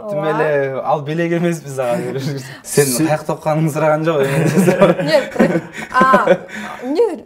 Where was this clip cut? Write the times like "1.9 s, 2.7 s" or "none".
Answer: 2.6 s